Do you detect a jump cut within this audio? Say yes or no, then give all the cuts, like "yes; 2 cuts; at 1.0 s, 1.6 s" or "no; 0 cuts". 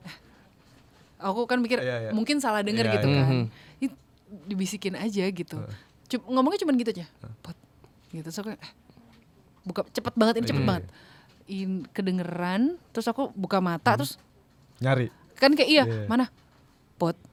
no; 0 cuts